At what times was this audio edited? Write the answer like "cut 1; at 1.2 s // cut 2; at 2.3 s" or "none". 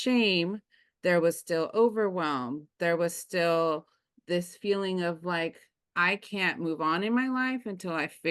none